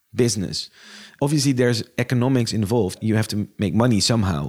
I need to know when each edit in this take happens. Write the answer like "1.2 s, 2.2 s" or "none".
1.1 s, 3.0 s